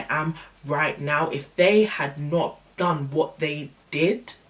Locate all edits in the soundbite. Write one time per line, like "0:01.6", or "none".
none